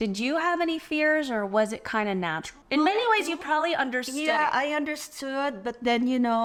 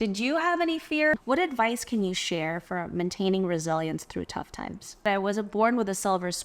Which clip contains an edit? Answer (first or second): second